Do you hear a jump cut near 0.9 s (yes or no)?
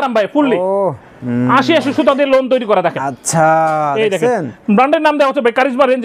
no